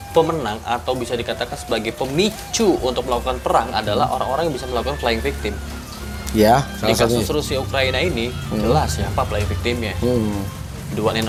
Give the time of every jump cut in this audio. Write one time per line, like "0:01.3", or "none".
none